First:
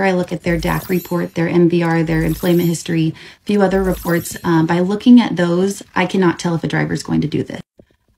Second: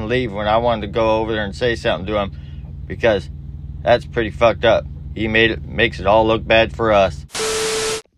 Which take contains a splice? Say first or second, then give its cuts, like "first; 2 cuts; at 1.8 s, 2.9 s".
second; 1 cut; at 7.2 s